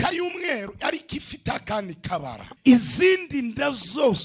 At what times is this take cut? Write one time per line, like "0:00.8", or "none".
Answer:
0:02.4